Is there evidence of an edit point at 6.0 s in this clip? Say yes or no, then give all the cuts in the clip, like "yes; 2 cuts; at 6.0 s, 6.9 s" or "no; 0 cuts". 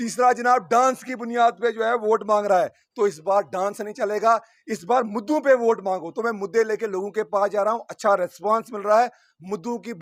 no; 0 cuts